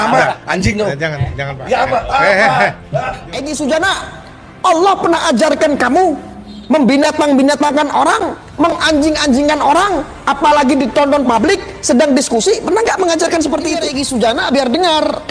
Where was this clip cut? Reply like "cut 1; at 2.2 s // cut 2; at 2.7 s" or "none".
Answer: cut 1; at 3.1 s // cut 2; at 13.8 s